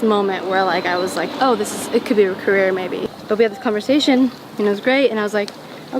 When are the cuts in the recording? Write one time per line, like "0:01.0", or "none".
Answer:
0:03.0